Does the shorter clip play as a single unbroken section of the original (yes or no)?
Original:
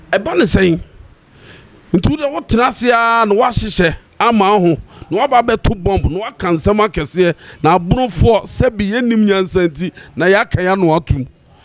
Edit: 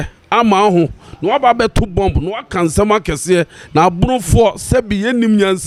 yes